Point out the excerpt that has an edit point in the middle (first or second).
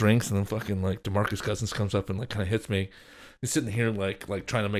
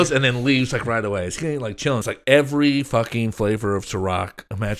second